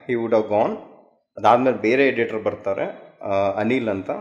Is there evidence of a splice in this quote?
no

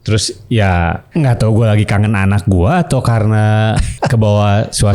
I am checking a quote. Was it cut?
yes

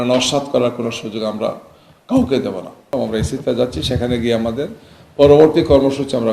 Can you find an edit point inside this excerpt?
yes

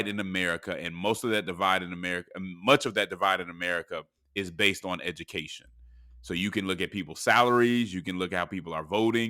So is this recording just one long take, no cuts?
yes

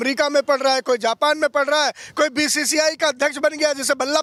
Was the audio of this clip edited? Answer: no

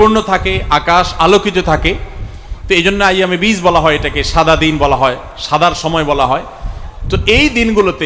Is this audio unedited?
yes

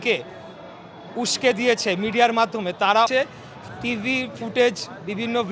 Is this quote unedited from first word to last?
no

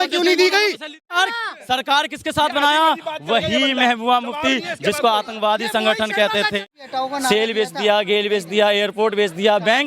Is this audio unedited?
no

